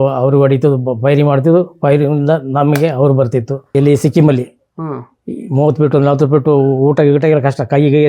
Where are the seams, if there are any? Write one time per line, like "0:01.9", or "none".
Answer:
0:03.7